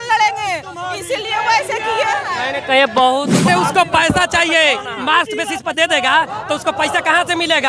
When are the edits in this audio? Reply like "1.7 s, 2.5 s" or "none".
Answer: 3.5 s